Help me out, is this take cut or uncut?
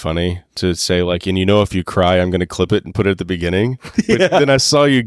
uncut